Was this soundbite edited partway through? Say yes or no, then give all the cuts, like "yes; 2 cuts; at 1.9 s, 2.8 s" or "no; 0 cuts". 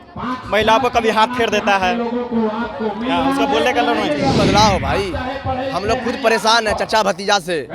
yes; 1 cut; at 4.4 s